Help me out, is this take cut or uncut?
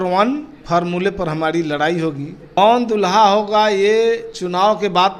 cut